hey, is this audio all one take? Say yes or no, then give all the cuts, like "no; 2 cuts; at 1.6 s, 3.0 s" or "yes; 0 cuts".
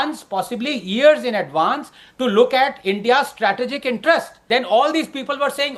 no; 1 cut; at 4.3 s